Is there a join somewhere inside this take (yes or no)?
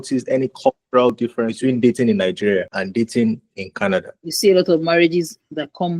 yes